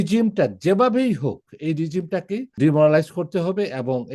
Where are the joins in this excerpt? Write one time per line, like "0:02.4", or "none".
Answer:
0:02.6